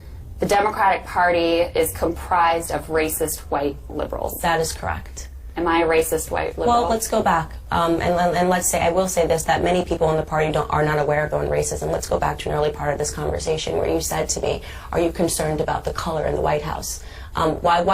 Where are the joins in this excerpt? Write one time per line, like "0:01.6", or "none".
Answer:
none